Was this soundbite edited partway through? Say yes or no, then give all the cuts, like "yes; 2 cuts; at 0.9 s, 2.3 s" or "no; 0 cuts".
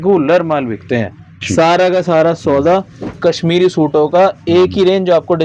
no; 0 cuts